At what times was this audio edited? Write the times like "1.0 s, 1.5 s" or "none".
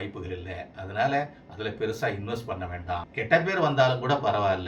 3.1 s